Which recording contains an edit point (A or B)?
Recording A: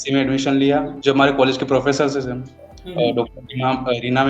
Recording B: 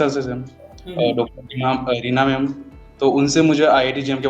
A